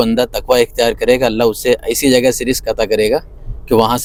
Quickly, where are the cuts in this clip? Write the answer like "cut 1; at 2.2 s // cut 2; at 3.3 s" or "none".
none